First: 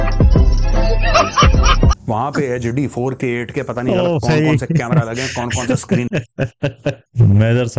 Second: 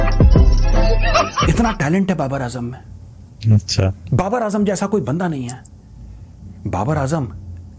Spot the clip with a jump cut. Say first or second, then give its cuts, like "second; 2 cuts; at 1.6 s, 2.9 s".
second; 1 cut; at 1.3 s